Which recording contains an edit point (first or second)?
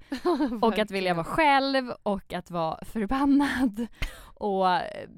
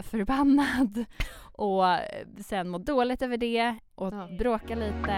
second